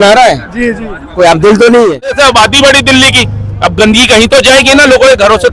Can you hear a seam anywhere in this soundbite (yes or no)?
yes